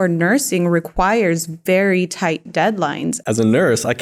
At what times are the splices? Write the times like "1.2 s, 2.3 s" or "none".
3.1 s